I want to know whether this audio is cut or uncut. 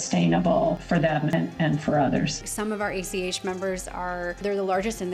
cut